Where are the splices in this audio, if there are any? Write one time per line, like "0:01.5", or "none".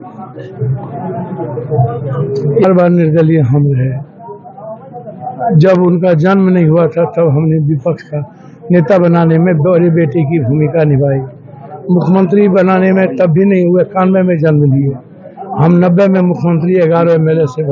0:02.6

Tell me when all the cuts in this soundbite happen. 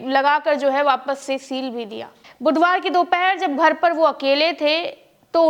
0:02.2

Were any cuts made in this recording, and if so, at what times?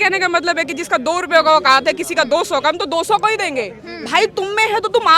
none

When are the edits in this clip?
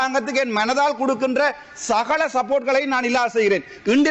none

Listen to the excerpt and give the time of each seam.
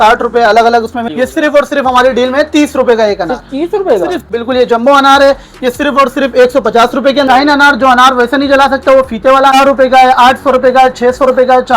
0:01.1
0:04.3
0:07.3
0:09.5

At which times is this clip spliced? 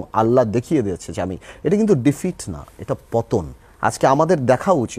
0:03.6

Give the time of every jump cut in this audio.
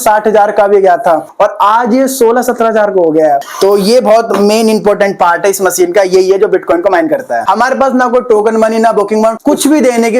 0:03.5
0:07.4
0:09.4

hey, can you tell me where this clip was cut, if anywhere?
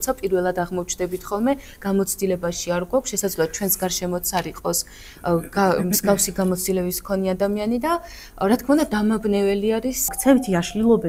0:10.1

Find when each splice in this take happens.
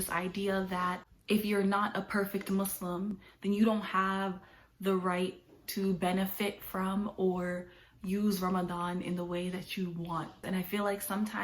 0:01.1
0:03.2
0:10.4

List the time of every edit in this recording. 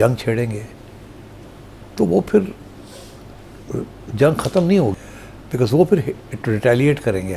0:05.0

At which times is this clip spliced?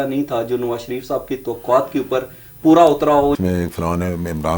0:03.4

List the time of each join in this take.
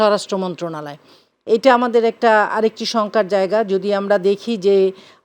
none

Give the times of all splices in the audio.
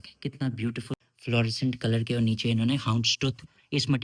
0:00.9

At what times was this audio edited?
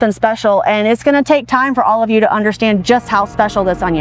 none

